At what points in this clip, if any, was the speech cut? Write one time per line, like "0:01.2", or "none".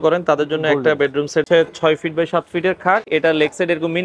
0:01.5
0:03.1